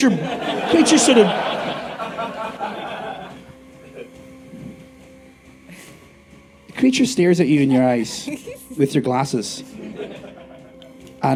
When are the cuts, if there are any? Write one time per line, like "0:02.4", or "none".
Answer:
none